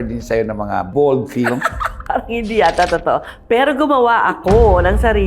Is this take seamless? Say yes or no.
yes